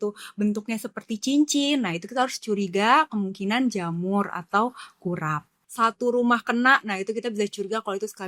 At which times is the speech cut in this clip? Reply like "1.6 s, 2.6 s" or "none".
5.6 s